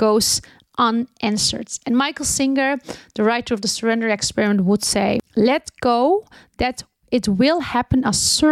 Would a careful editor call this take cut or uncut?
cut